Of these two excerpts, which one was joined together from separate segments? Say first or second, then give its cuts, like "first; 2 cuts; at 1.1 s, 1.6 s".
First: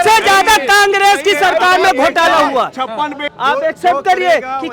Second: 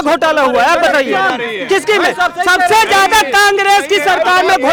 first; 1 cut; at 3.2 s